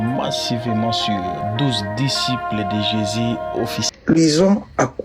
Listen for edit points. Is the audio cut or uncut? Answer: cut